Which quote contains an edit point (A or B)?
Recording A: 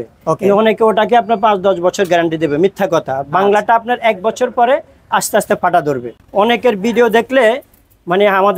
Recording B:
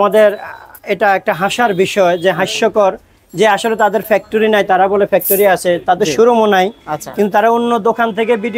A